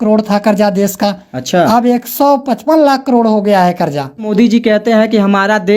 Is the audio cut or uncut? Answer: cut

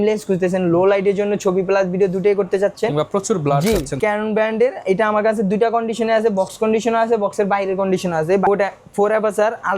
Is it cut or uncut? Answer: cut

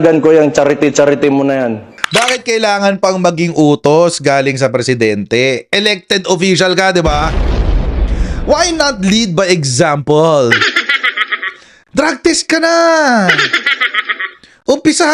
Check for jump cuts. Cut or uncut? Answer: cut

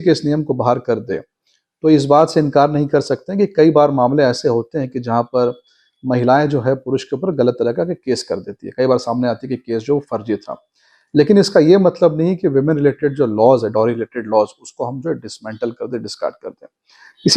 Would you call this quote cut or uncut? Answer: uncut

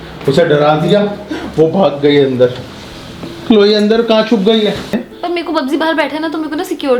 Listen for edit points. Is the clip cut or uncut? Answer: cut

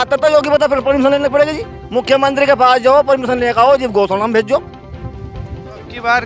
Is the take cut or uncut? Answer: uncut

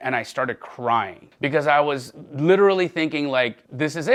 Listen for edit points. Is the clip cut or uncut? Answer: uncut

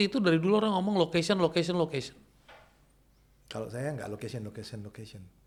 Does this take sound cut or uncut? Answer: uncut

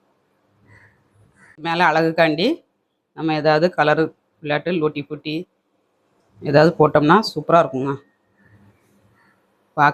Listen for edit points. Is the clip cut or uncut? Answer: cut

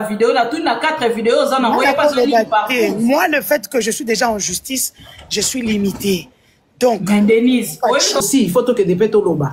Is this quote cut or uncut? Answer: cut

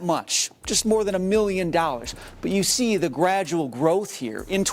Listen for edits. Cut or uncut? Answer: uncut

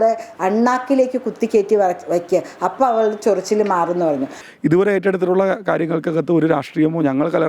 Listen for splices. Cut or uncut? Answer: cut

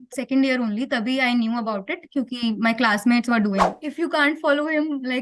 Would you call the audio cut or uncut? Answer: cut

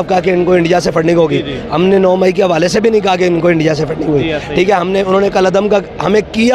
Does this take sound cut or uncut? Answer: uncut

